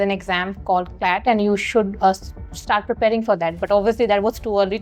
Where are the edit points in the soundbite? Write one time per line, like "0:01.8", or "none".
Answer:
none

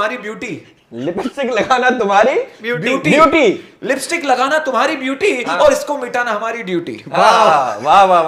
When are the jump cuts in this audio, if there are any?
none

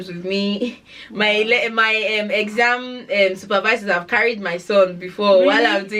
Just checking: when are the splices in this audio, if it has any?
none

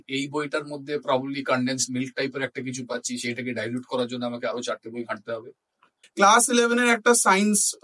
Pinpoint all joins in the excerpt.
0:06.0

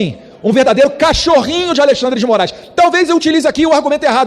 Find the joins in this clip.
none

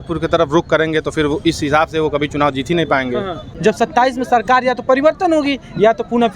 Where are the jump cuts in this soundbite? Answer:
0:03.5

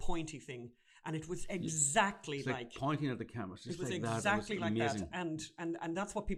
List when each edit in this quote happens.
none

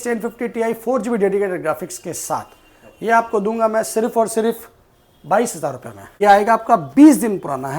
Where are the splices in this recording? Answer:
0:06.2

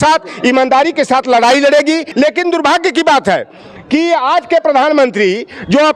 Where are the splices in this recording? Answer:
0:02.1

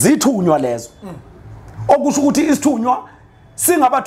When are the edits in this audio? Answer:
none

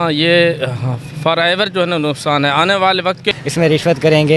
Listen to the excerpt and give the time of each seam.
0:03.3

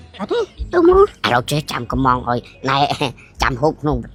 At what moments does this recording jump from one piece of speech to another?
none

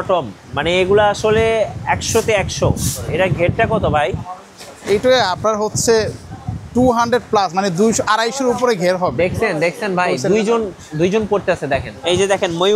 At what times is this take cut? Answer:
0:03.1
0:11.9

